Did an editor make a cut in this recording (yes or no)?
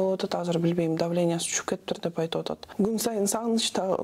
yes